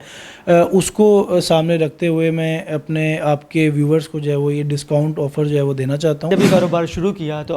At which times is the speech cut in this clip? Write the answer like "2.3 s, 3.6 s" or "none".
6.2 s

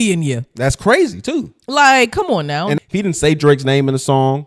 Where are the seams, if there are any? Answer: 2.8 s

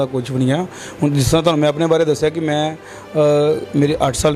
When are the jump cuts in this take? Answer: none

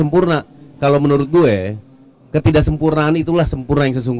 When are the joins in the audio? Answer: none

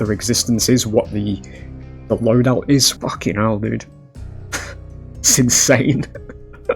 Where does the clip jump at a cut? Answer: 2.9 s

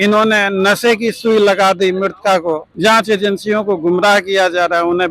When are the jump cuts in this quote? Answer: 2.7 s

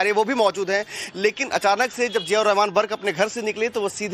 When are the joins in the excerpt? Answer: 2.5 s

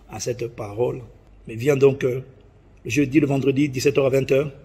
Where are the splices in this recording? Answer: none

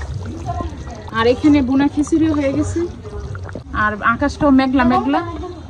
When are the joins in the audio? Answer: 1.2 s, 3.6 s

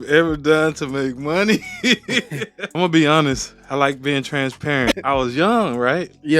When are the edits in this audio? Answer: 2.6 s, 5.0 s

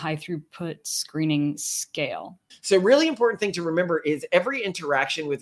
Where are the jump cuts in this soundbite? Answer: 2.4 s

